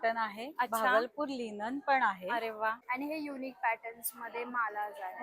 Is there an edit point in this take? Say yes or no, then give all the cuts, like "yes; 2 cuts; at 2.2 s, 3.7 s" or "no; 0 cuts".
yes; 1 cut; at 2.8 s